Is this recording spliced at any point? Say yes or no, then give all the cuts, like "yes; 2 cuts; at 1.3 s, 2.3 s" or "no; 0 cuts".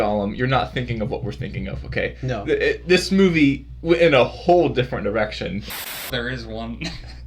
yes; 1 cut; at 5.8 s